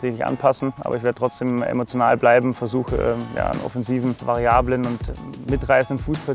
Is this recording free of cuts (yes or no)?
no